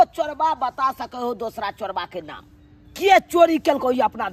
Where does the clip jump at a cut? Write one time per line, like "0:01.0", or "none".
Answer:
none